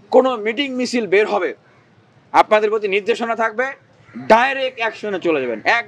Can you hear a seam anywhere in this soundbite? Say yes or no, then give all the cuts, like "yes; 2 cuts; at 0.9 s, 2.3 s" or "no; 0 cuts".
no; 0 cuts